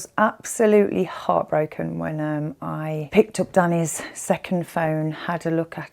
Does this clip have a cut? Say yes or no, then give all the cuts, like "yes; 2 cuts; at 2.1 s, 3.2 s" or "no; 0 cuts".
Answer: yes; 1 cut; at 3.1 s